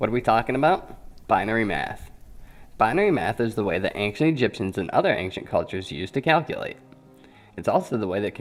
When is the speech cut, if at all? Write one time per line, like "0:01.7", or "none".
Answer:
none